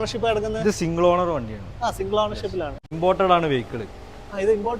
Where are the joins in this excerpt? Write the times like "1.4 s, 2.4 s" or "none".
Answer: 2.9 s